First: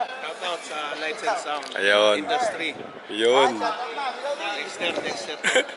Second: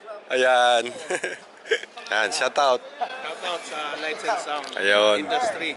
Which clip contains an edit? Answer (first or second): second